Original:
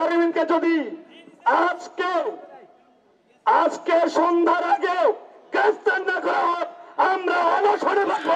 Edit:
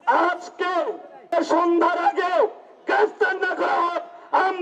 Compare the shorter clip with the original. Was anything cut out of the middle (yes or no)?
yes